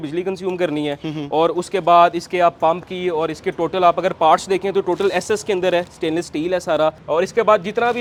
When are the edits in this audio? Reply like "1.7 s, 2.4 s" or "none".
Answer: none